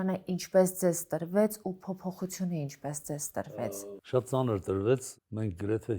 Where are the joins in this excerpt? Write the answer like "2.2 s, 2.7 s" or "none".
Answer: 3.5 s, 5.1 s